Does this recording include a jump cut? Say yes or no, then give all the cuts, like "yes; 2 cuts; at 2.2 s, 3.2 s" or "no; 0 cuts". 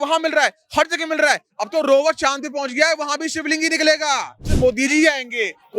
yes; 1 cut; at 4.5 s